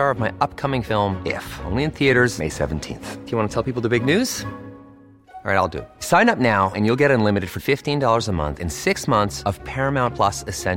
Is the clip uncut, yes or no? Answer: yes